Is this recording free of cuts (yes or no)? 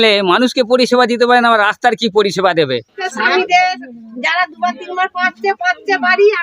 no